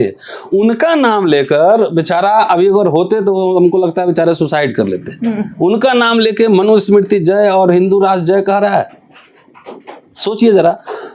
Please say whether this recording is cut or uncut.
uncut